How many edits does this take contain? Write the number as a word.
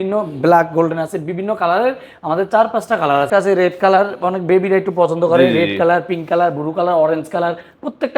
one